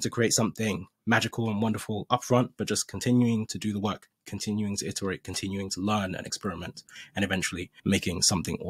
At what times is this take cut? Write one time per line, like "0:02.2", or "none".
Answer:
0:07.7